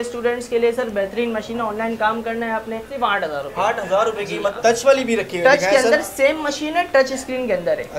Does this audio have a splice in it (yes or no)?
yes